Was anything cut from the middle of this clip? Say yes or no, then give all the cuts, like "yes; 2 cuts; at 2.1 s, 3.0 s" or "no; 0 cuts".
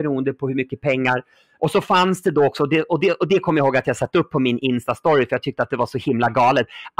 yes; 1 cut; at 1.4 s